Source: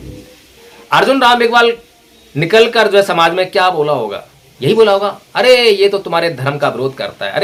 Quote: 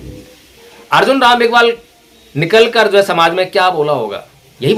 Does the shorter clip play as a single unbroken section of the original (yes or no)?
yes